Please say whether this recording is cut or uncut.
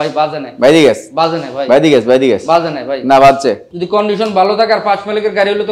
cut